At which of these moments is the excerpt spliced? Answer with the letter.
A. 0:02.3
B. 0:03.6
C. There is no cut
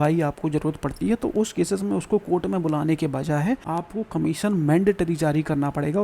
B